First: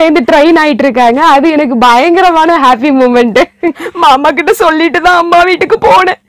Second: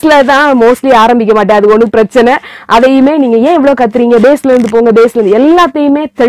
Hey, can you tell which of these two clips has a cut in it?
first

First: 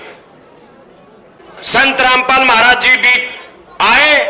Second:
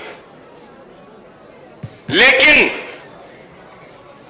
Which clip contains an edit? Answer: first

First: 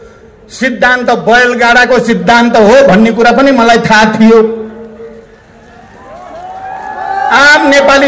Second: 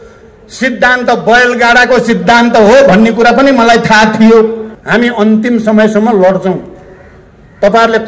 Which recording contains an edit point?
second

